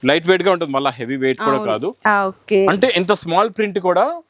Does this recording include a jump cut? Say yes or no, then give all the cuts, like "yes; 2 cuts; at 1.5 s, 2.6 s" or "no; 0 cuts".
yes; 1 cut; at 2.0 s